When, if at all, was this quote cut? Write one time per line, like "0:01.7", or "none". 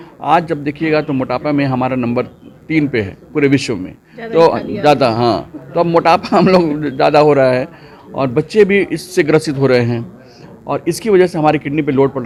none